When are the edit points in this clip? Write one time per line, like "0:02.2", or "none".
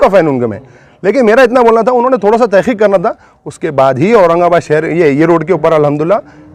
none